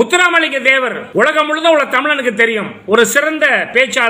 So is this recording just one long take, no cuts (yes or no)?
no